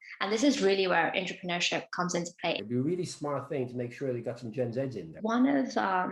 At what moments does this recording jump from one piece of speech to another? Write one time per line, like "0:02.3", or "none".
0:02.6
0:05.1